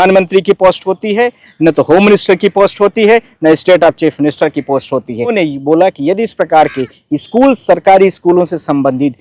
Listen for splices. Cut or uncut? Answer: cut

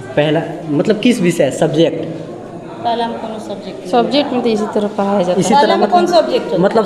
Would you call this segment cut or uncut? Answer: uncut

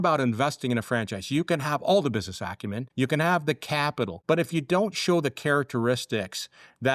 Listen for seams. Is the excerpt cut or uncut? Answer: cut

